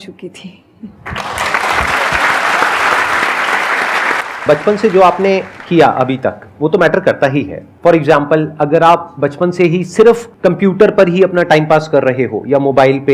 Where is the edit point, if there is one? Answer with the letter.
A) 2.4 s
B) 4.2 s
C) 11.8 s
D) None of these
B